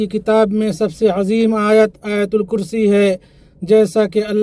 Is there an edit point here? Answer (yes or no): no